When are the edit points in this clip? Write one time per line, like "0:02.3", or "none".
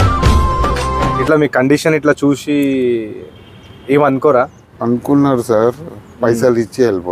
0:01.2
0:04.6